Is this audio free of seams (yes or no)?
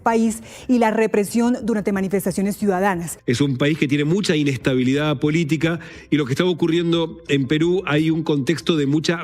no